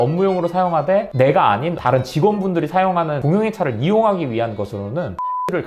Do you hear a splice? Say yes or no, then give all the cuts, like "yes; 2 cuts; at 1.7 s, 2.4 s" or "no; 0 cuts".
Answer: no; 0 cuts